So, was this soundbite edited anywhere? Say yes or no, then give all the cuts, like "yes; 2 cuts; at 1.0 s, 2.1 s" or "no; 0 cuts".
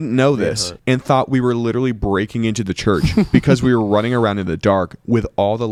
no; 0 cuts